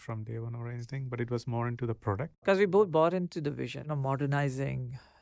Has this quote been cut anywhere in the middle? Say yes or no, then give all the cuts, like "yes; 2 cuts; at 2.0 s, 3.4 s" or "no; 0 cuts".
yes; 2 cuts; at 2.5 s, 3.8 s